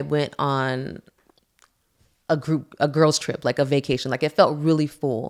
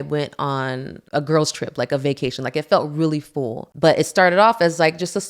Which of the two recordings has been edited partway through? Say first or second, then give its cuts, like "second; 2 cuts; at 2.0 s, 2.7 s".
second; 2 cuts; at 1.0 s, 3.6 s